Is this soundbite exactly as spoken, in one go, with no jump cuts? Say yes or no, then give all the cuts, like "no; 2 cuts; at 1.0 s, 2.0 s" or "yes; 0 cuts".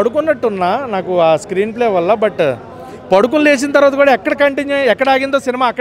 yes; 0 cuts